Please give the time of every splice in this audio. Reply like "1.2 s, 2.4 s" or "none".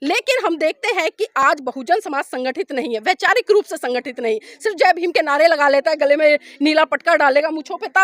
none